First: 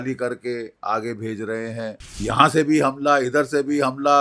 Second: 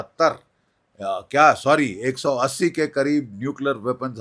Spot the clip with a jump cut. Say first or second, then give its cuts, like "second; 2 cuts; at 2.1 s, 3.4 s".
first; 1 cut; at 2.2 s